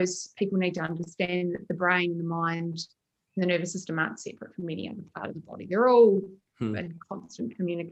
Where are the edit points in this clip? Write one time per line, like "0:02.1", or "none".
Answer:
none